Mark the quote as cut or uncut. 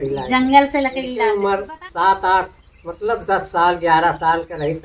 cut